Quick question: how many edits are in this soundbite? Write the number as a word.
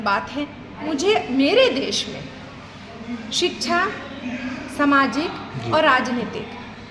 one